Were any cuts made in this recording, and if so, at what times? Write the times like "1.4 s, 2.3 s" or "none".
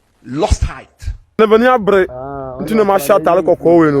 1.4 s